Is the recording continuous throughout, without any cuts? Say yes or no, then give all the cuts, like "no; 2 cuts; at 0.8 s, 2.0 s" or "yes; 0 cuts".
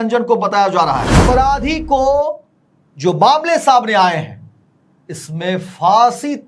no; 1 cut; at 1.2 s